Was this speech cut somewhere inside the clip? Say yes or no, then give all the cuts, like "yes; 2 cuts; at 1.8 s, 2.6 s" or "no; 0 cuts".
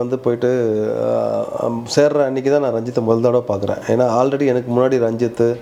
no; 0 cuts